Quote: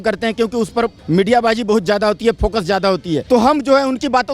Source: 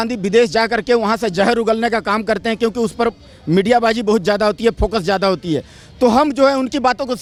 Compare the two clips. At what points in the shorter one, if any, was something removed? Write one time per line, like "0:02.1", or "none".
0:01.0
0:03.2